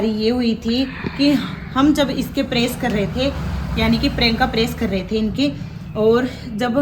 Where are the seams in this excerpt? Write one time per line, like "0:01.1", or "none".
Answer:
none